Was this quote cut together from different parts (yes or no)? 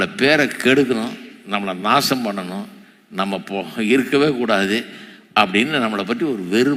no